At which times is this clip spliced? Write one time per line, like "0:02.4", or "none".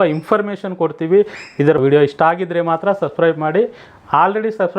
0:01.7